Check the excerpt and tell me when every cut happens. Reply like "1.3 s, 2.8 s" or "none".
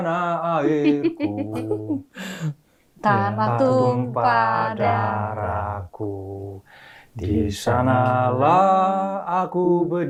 none